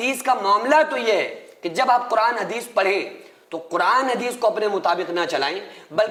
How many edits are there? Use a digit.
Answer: 0